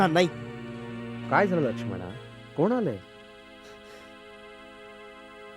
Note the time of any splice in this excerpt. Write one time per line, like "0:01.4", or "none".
none